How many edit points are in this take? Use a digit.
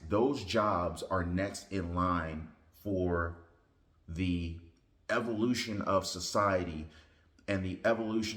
0